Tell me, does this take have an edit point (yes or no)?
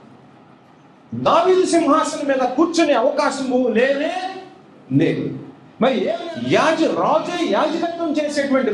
yes